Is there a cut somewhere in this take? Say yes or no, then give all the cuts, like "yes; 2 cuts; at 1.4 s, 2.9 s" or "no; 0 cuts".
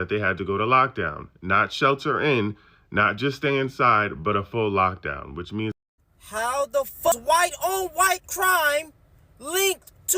yes; 2 cuts; at 5.7 s, 7.2 s